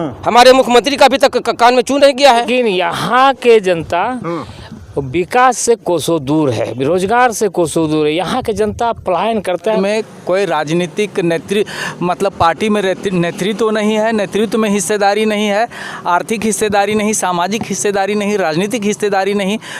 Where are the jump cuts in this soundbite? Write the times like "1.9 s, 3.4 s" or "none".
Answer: 2.5 s, 9.8 s